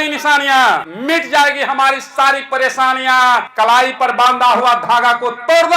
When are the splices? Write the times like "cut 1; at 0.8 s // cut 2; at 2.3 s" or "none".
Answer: cut 1; at 0.9 s // cut 2; at 3.5 s